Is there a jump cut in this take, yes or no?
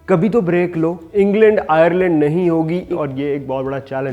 yes